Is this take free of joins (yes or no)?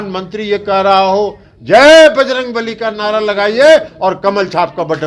yes